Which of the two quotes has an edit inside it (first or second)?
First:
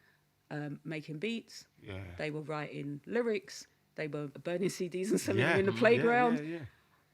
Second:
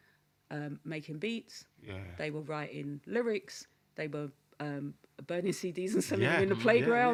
first